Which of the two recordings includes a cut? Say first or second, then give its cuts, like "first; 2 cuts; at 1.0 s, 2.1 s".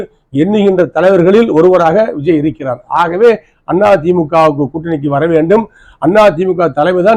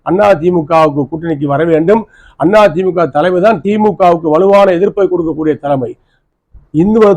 second; 1 cut; at 6.2 s